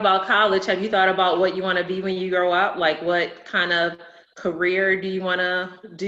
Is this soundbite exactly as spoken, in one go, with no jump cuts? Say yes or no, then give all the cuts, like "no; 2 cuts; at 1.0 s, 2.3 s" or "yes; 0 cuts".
yes; 0 cuts